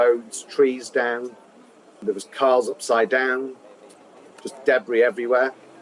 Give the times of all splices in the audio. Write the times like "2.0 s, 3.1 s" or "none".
none